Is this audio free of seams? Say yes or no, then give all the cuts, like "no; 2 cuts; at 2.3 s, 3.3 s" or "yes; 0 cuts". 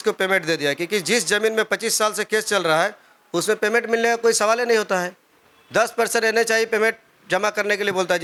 yes; 0 cuts